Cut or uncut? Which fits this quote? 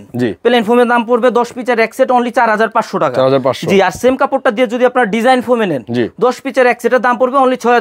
uncut